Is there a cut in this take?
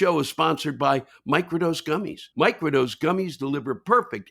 yes; 1 cut; at 2.2 s

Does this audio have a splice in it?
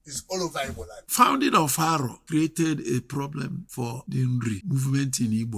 yes; 4 cuts; at 1.0 s, 2.2 s, 3.8 s, 4.6 s

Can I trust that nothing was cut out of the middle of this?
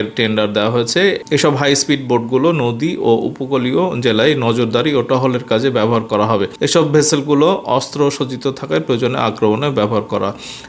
yes; 0 cuts

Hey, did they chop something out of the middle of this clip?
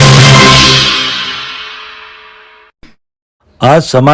yes; 1 cut; at 2.7 s

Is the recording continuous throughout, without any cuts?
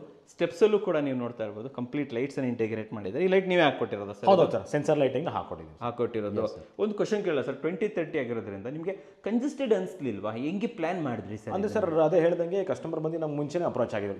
yes; 0 cuts

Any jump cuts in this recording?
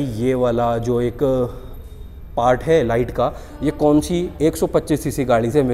no; 0 cuts

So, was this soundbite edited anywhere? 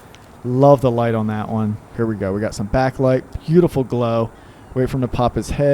yes; 1 cut; at 1.9 s

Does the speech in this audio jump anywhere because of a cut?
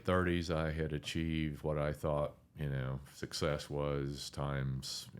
no; 0 cuts

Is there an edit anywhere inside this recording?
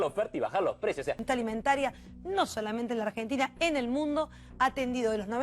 yes; 1 cut; at 1.2 s

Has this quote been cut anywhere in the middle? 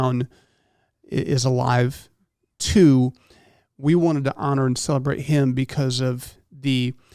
no; 0 cuts

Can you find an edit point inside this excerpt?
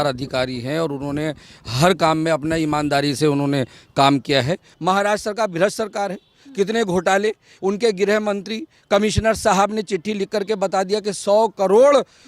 yes; 1 cut; at 4.7 s

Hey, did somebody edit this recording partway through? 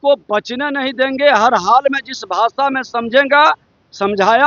no; 0 cuts

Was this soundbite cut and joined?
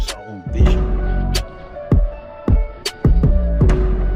no; 0 cuts

